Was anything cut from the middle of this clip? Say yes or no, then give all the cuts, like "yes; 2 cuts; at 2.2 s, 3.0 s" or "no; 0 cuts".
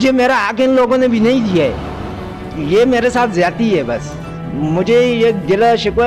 no; 0 cuts